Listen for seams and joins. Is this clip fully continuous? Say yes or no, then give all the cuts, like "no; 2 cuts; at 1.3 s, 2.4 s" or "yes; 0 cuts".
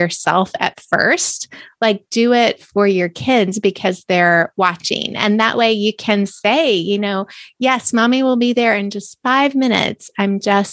yes; 0 cuts